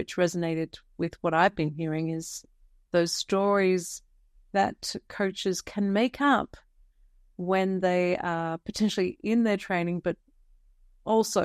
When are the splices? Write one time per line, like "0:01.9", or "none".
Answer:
none